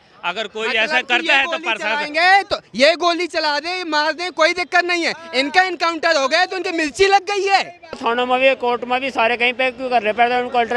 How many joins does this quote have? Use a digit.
1